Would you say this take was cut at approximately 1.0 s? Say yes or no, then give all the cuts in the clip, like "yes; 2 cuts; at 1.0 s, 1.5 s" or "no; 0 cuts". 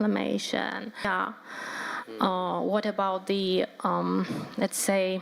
yes; 1 cut; at 1.0 s